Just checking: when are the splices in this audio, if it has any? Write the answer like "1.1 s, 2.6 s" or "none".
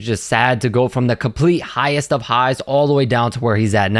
none